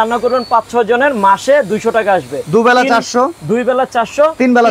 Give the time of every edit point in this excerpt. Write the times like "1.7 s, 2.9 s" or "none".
none